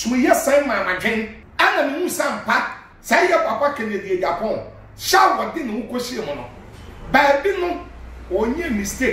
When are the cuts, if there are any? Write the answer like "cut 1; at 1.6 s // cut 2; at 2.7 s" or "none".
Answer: cut 1; at 1.4 s